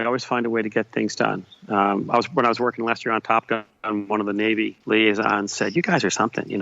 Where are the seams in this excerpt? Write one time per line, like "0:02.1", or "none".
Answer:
0:04.8